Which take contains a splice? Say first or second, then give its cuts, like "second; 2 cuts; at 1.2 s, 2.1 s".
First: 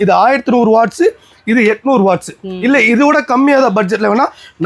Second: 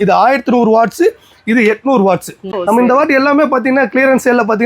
second; 1 cut; at 2.5 s